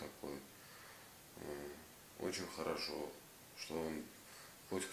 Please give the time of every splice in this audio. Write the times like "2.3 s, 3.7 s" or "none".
none